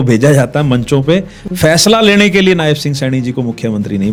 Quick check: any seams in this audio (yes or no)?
no